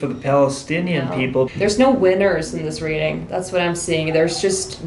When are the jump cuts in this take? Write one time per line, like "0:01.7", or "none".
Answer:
0:01.5